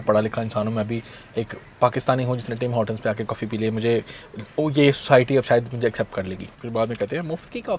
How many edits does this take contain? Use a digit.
1